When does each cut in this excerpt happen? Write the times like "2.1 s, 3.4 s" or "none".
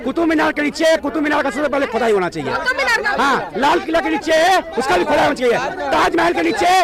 none